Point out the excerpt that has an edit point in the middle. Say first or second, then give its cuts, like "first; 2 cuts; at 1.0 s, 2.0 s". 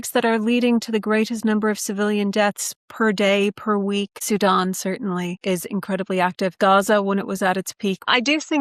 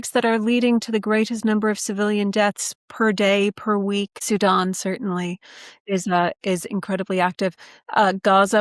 first; 2 cuts; at 5.4 s, 6.5 s